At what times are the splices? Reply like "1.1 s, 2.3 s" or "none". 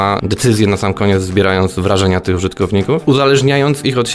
3.0 s